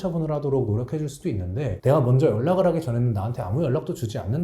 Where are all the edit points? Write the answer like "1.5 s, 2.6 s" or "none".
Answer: 1.8 s